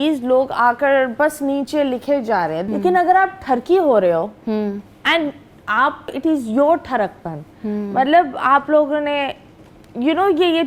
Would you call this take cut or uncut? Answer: cut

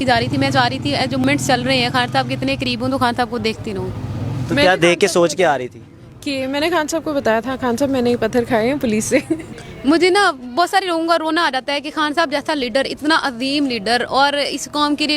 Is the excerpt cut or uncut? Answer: cut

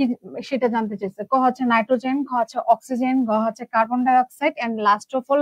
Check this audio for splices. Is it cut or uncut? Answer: uncut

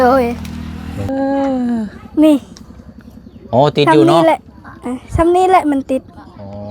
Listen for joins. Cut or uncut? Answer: cut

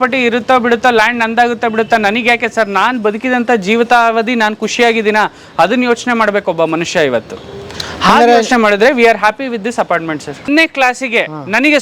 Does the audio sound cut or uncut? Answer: cut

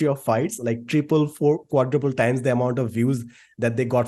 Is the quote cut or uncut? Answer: uncut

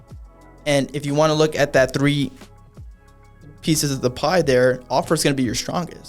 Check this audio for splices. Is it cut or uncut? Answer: uncut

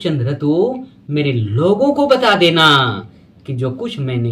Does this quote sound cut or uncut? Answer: uncut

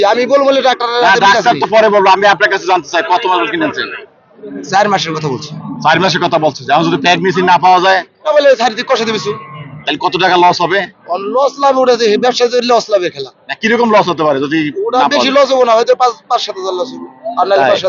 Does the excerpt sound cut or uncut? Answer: uncut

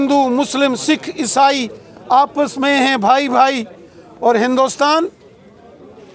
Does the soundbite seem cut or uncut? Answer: uncut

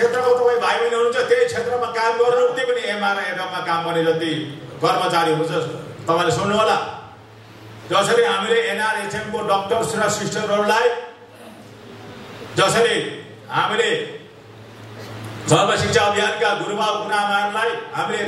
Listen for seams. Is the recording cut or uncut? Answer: cut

